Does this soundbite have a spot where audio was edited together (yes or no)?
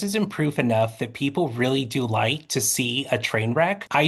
no